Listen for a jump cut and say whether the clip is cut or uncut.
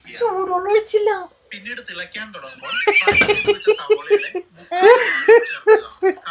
uncut